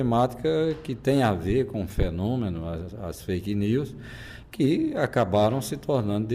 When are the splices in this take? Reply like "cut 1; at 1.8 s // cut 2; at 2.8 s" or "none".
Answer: none